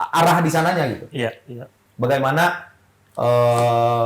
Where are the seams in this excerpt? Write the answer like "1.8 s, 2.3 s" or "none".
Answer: none